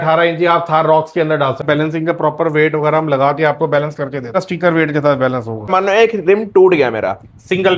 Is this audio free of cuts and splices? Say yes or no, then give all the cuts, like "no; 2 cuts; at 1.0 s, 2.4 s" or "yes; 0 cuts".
no; 3 cuts; at 1.6 s, 4.4 s, 5.7 s